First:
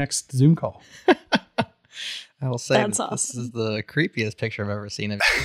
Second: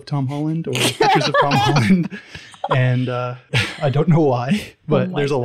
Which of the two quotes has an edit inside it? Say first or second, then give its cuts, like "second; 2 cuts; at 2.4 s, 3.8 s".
second; 1 cut; at 3.4 s